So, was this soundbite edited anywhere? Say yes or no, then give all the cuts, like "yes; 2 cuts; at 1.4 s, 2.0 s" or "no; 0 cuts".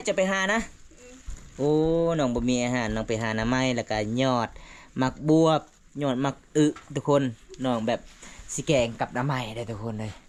no; 0 cuts